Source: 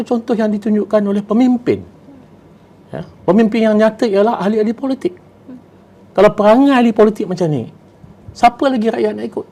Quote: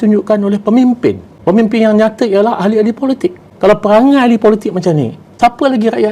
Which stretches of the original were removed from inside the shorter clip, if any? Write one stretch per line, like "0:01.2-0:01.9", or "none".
0:01.9-0:03.1
0:05.3-0:06.0
0:07.8-0:08.2